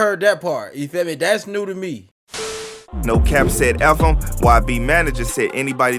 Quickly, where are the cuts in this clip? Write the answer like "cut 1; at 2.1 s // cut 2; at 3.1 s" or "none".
cut 1; at 2.7 s